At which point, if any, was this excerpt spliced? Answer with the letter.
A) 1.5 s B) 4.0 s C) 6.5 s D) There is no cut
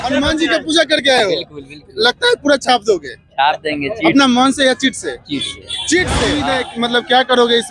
C